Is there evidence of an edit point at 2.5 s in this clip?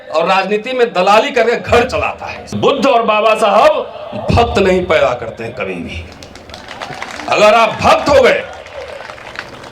yes; 1 cut; at 2.5 s

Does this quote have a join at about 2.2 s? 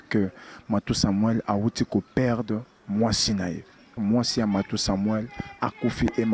no; 1 cut; at 4.0 s

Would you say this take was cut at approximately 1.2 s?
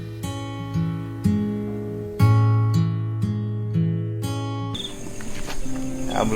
no; 1 cut; at 4.7 s

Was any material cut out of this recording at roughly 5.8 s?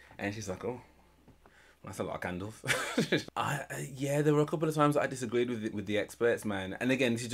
yes; 2 cuts; at 3.2 s, 5.8 s

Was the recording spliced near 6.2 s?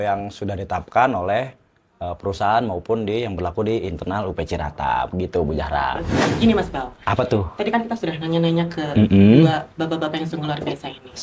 yes; 1 cut; at 6.2 s

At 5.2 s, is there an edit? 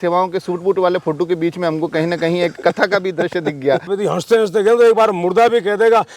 no; 1 cut; at 3.9 s

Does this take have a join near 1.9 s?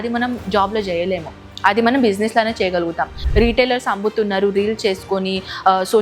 no; 1 cut; at 3.2 s

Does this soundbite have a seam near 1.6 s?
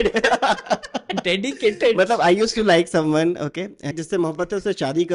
no; 1 cut; at 3.9 s

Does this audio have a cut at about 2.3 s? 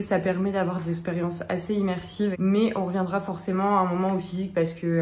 yes; 1 cut; at 2.3 s

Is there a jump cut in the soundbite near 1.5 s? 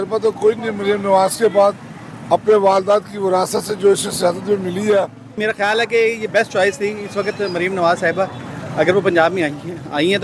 no; 1 cut; at 5.4 s

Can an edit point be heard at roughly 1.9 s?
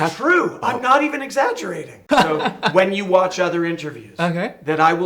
yes; 1 cut; at 1.9 s

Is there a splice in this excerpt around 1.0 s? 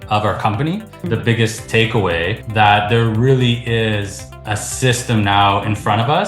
yes; 1 cut; at 1.0 s

